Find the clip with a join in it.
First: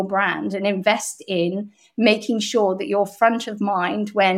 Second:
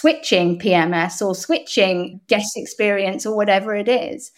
second; 1 cut; at 2.1 s

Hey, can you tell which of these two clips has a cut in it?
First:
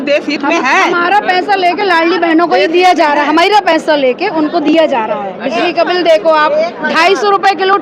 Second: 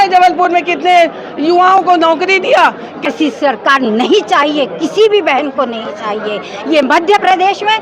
second; 1 cut; at 3.1 s

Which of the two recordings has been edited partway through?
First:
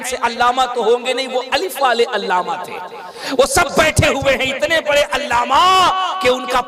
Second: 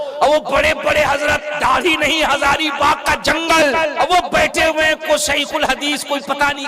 second; 1 cut; at 3.9 s

